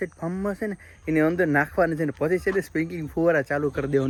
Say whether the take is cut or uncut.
uncut